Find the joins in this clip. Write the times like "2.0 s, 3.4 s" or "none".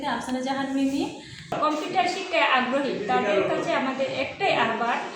1.6 s